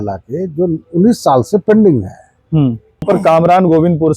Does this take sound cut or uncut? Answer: cut